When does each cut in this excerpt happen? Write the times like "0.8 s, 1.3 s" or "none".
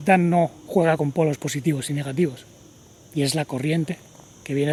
none